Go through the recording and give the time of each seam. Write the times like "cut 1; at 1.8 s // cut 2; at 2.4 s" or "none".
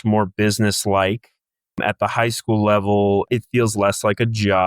cut 1; at 1.8 s // cut 2; at 3.3 s

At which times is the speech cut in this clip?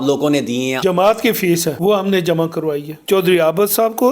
cut 1; at 0.8 s // cut 2; at 1.8 s // cut 3; at 3.0 s

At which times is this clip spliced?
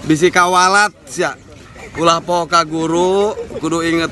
cut 1; at 1.8 s

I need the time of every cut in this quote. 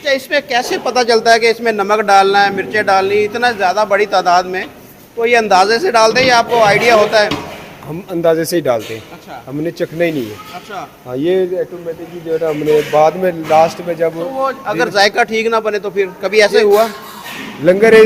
none

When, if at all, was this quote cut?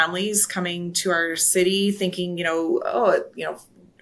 none

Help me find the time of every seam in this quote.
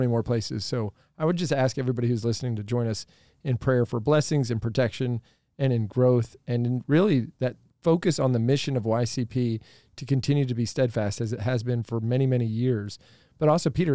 cut 1; at 7.7 s

